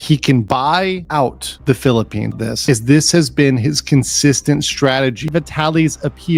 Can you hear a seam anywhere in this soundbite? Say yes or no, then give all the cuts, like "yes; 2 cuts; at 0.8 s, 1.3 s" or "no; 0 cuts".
yes; 2 cuts; at 2.3 s, 5.3 s